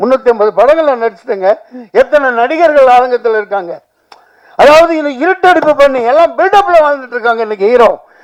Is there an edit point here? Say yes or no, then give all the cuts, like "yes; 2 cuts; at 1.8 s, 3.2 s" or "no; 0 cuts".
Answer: no; 0 cuts